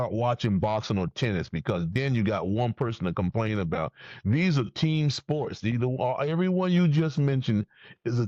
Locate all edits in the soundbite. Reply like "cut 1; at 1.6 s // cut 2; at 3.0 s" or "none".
none

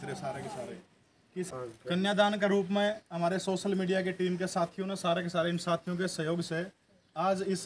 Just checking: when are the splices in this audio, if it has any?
cut 1; at 1.5 s

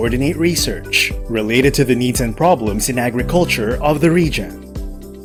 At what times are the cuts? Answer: none

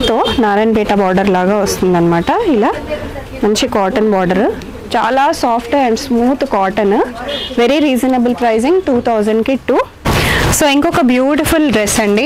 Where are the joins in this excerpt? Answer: cut 1; at 10.0 s

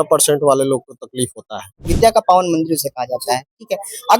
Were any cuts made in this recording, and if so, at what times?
cut 1; at 1.9 s

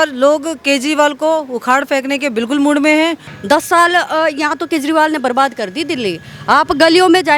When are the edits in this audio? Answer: cut 1; at 3.3 s

